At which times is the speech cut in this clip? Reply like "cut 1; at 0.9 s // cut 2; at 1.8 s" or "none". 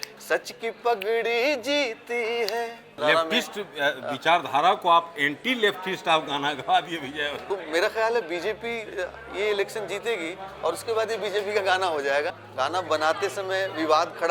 cut 1; at 3.0 s // cut 2; at 7.4 s // cut 3; at 12.3 s